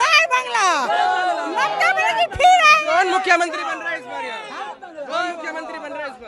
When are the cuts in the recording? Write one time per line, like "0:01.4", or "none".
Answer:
none